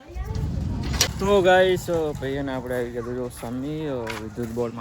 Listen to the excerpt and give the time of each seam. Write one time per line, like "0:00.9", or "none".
0:01.1